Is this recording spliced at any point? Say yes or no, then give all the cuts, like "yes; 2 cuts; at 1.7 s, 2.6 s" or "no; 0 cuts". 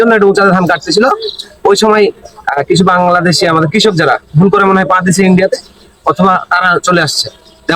no; 0 cuts